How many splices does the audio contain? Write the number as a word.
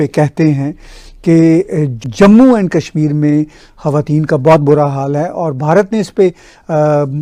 zero